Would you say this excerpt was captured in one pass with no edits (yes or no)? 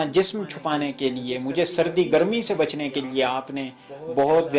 yes